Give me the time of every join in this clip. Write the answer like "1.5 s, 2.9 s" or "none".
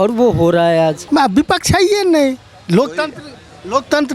1.0 s